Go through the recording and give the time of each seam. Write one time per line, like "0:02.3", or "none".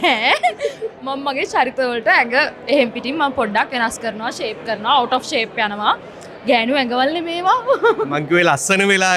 none